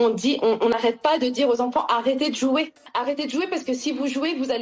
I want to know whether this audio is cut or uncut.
cut